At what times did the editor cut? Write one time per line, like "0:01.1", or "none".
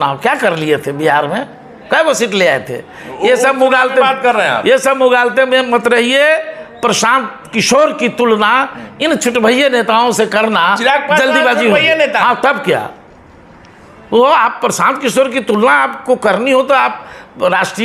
none